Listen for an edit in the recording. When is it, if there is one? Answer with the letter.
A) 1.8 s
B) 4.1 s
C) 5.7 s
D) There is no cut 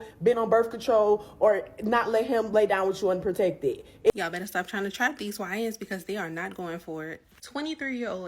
B